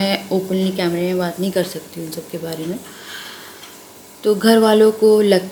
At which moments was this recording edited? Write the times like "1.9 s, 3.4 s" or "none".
none